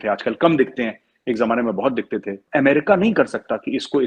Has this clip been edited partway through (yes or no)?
yes